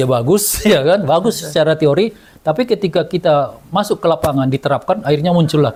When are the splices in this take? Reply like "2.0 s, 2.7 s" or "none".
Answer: none